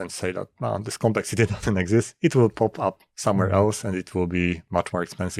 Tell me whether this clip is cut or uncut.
uncut